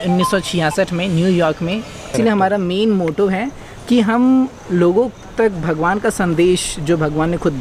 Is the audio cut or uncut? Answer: cut